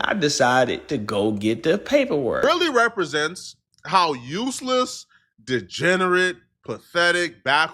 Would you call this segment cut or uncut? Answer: cut